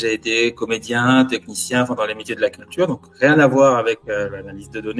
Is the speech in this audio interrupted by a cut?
no; 0 cuts

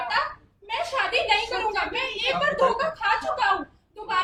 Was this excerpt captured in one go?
yes; 0 cuts

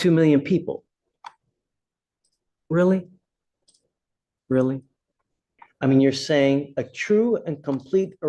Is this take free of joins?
no; 1 cut; at 5.6 s

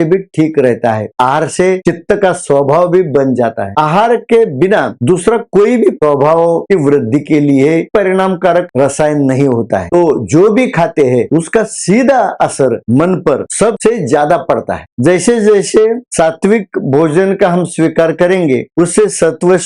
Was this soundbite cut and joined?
yes; 4 cuts; at 1.1 s, 3.7 s, 9.8 s, 14.8 s

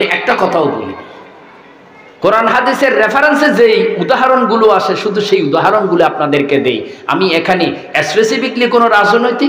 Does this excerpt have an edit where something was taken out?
no; 0 cuts

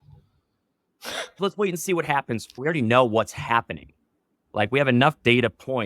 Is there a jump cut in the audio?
yes; 2 cuts; at 1.4 s, 2.6 s

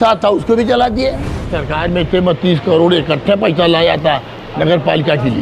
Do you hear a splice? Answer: yes; 1 cut; at 1.6 s

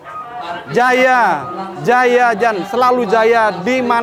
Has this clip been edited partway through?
no; 0 cuts

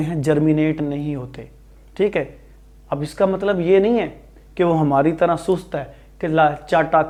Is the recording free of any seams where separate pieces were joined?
yes; 0 cuts

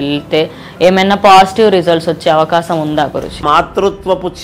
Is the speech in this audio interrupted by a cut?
yes; 1 cut; at 3.4 s

